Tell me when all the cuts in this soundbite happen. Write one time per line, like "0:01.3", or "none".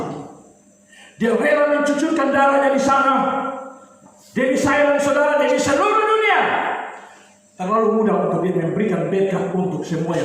none